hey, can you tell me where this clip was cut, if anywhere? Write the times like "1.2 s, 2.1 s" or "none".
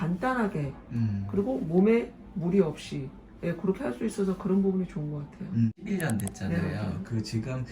5.8 s